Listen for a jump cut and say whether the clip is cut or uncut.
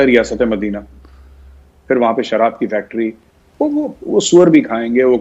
uncut